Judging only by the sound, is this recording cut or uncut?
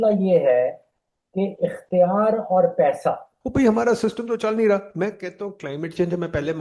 cut